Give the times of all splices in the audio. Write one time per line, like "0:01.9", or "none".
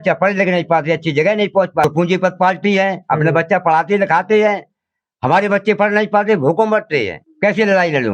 0:01.8
0:07.2